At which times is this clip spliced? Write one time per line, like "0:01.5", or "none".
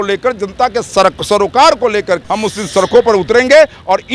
0:02.2

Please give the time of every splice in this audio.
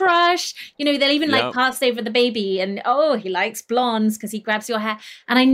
0:01.8

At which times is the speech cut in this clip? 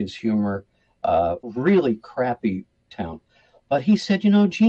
0:01.4

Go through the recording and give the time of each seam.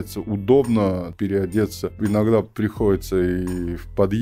0:01.1
0:01.9

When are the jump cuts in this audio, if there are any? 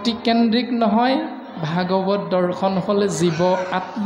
none

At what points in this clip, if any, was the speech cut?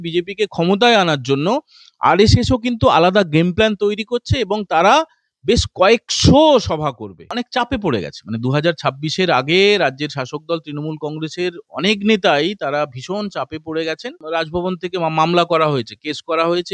0:07.2
0:14.2

